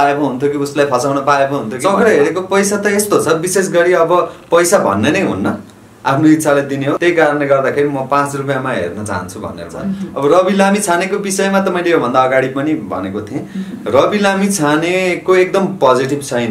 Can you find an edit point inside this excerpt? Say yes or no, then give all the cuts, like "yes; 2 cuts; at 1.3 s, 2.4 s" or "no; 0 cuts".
yes; 3 cuts; at 1.7 s, 7.0 s, 10.1 s